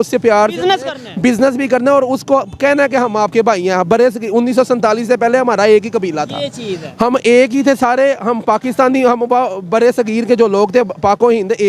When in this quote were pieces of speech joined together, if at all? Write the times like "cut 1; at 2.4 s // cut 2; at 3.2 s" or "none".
none